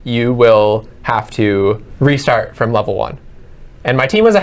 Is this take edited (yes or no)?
yes